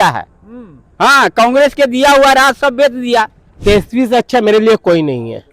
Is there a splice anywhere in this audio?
yes; 1 cut; at 3.4 s

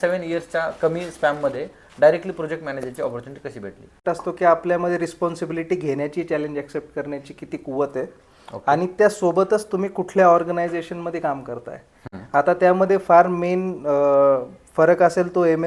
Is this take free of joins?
no; 1 cut; at 4.0 s

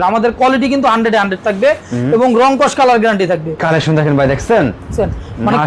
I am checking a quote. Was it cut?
yes; 1 cut; at 3.6 s

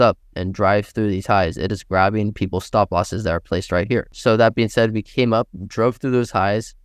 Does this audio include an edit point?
yes; 1 cut; at 4.1 s

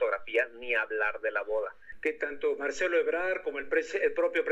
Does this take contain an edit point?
yes; 1 cut; at 1.8 s

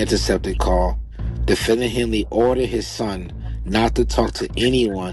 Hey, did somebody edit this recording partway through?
no; 0 cuts

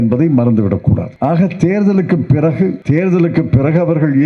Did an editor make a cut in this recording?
yes; 2 cuts; at 1.1 s, 2.8 s

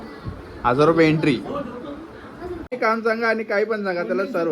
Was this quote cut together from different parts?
yes; 1 cut; at 2.8 s

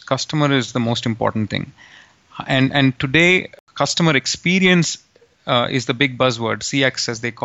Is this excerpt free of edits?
no; 1 cut; at 3.6 s

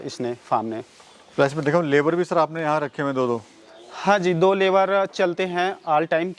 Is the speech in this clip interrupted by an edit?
no; 0 cuts

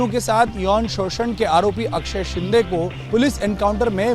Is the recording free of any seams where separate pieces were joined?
no; 1 cut; at 3.0 s

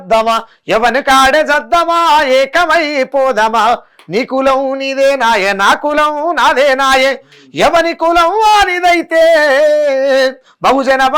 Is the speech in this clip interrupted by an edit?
no; 0 cuts

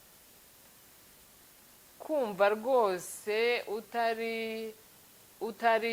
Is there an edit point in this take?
no; 0 cuts

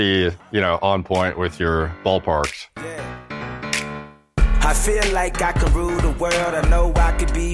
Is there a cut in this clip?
yes; 1 cut; at 2.7 s

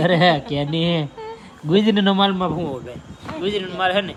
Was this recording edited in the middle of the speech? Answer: no; 0 cuts

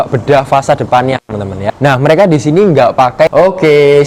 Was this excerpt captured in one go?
no; 2 cuts; at 1.6 s, 3.3 s

